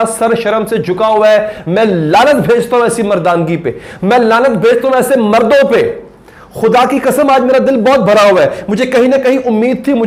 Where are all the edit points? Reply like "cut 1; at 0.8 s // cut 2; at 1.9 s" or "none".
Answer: none